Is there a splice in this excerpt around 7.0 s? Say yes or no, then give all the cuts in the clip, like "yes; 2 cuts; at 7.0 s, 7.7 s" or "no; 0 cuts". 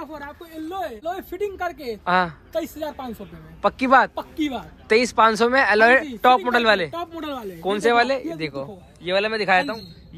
no; 1 cut; at 1.0 s